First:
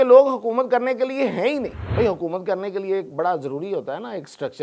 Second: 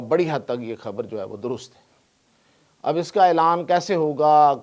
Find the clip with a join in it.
first; 1 cut; at 1.8 s

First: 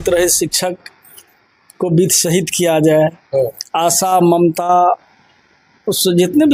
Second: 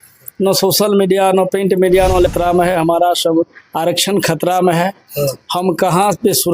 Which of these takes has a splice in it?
second; 1 cut; at 2.3 s

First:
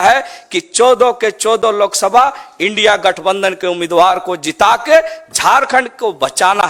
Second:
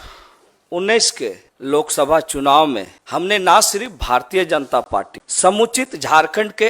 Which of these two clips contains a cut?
second; 3 cuts; at 1.5 s, 2.9 s, 5.2 s

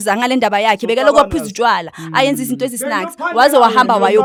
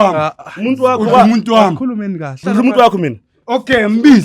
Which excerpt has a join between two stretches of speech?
second; 1 cut; at 2.4 s

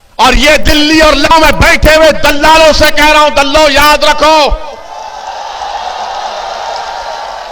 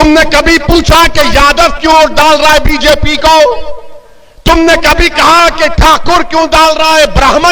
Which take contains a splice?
first; 1 cut; at 1.3 s

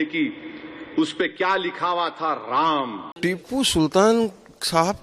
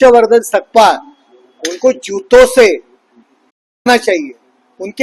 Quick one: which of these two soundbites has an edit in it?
first; 1 cut; at 3.0 s

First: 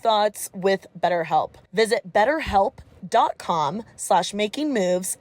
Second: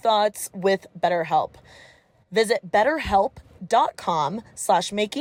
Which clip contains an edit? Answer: first; 1 cut; at 1.6 s

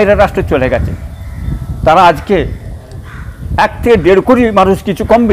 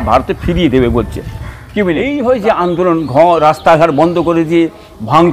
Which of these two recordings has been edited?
second; 1 cut; at 2.0 s

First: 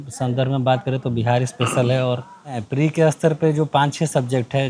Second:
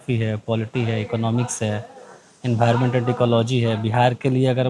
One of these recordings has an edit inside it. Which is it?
first; 1 cut; at 2.6 s

